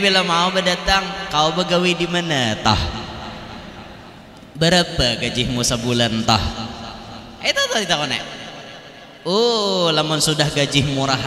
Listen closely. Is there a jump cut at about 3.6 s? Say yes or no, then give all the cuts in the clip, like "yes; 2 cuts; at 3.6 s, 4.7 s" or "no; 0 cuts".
no; 0 cuts